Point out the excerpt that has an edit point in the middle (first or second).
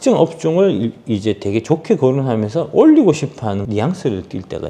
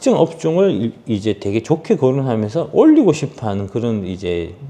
first